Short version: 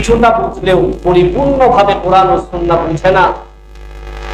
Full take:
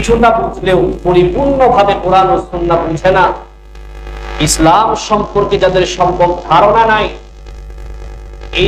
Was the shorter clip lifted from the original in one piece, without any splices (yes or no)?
yes